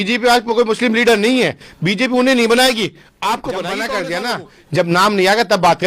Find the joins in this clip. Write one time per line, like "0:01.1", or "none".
0:03.9